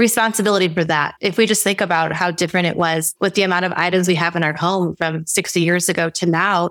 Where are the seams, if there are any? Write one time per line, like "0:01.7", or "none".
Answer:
0:01.2